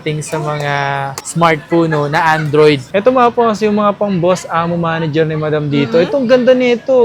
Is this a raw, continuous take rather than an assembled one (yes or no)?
no